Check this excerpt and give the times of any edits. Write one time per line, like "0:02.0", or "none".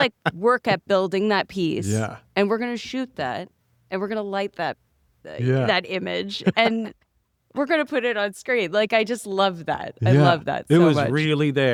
none